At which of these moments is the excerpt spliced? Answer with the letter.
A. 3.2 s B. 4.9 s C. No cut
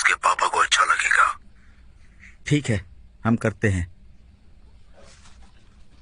C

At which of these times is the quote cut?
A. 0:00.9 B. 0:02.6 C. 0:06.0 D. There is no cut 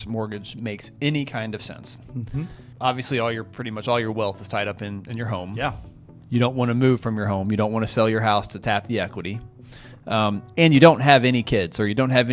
B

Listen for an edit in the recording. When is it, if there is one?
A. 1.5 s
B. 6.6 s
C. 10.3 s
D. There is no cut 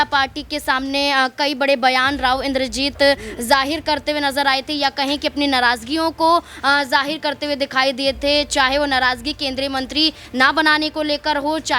D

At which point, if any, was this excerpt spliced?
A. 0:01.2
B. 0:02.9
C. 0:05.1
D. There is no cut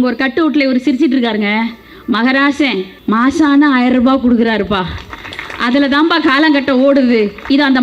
B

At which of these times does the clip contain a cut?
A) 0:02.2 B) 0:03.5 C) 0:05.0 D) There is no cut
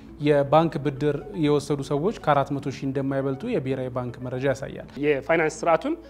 C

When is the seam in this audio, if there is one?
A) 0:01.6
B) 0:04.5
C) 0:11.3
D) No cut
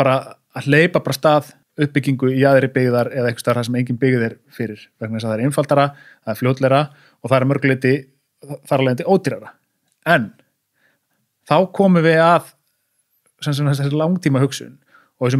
A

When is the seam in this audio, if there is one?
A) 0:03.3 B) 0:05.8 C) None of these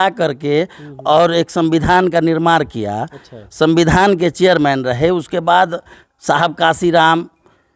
C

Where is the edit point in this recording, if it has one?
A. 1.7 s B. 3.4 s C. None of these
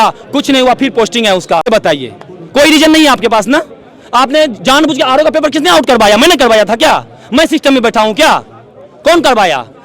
A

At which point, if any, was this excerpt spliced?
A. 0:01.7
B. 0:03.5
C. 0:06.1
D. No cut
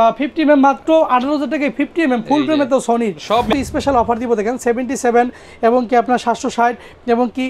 B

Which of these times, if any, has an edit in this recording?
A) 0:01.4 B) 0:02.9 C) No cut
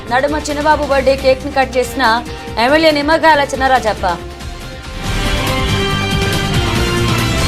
C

